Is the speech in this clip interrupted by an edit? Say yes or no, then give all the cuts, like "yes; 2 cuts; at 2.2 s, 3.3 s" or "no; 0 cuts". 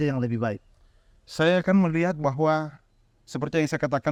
no; 0 cuts